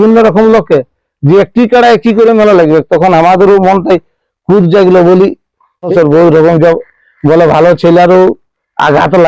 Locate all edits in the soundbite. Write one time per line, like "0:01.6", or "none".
0:05.9